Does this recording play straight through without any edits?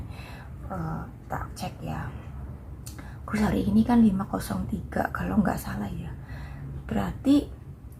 yes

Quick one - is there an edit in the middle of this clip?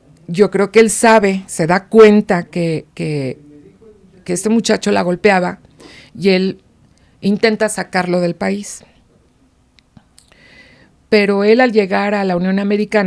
no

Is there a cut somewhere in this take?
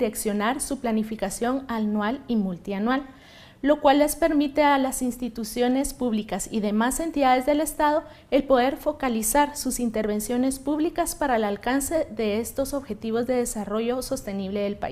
yes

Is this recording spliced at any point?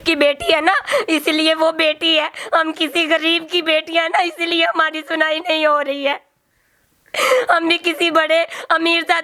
no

